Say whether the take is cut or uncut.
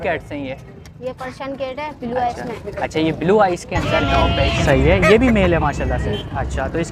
cut